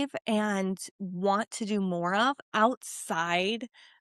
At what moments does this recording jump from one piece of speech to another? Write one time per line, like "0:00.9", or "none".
none